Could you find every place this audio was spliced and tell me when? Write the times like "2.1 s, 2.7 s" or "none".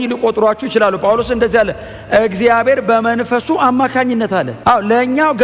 4.5 s